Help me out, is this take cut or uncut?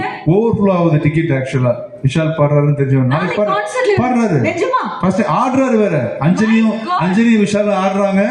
uncut